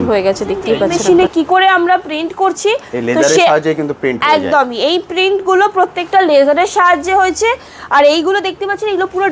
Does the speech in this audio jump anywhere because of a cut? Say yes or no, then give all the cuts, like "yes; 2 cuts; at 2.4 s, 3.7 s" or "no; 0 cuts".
yes; 1 cut; at 1.0 s